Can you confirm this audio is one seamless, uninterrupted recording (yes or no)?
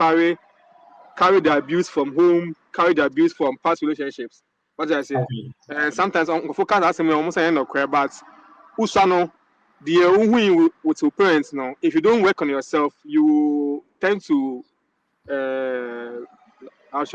yes